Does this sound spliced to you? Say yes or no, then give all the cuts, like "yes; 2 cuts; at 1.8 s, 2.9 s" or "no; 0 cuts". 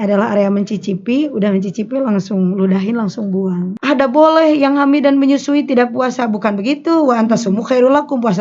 yes; 1 cut; at 3.7 s